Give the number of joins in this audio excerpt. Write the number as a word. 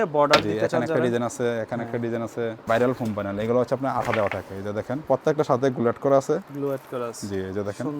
two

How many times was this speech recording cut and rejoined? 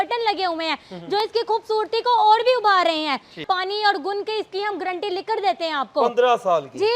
one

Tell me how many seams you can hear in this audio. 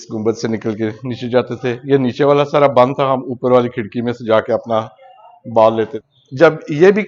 one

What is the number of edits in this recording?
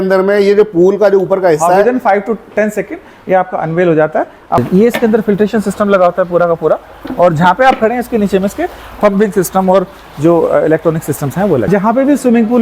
two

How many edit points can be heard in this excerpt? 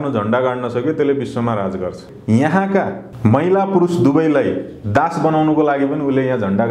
two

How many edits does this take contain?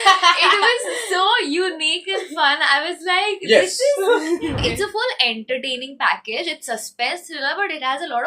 one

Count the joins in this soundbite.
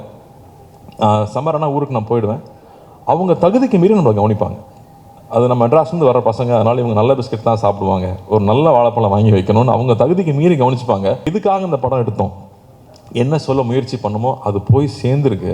one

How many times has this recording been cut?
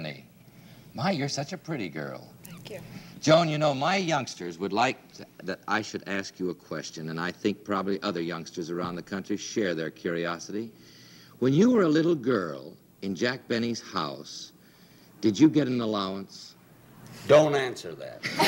one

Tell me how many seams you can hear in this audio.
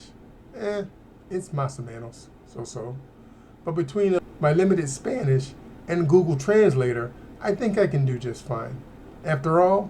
one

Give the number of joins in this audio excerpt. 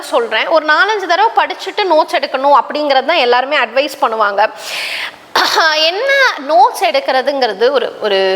zero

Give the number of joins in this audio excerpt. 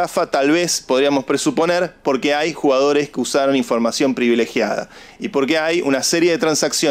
zero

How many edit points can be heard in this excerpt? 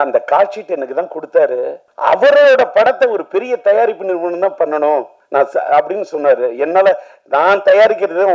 two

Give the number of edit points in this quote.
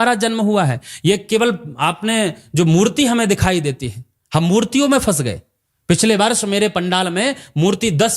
zero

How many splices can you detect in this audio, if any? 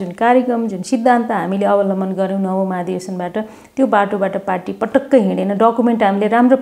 zero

